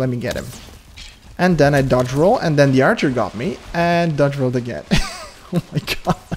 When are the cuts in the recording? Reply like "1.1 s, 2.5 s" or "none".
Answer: none